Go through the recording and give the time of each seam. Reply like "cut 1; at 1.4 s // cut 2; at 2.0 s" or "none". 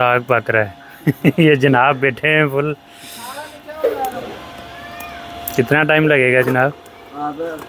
none